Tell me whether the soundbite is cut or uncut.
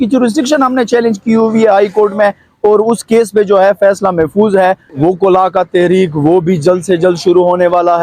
cut